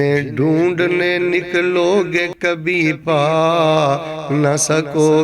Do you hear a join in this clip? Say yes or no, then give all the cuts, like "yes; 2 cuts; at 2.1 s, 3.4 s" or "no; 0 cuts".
no; 0 cuts